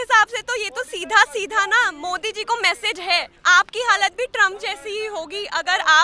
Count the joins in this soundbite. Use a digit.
0